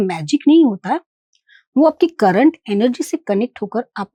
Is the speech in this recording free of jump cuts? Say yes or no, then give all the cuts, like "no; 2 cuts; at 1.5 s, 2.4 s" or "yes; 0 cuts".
yes; 0 cuts